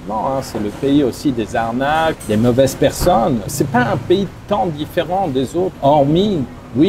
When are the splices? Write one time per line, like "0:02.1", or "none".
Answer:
0:02.2
0:03.5
0:05.7